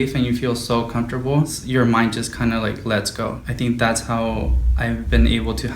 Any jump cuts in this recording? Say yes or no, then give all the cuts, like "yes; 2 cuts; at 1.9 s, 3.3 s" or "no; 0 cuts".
yes; 2 cuts; at 1.6 s, 3.4 s